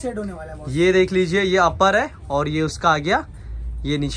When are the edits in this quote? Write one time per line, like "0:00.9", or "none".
none